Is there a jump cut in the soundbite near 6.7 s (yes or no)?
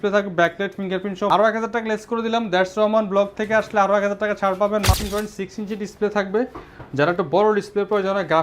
no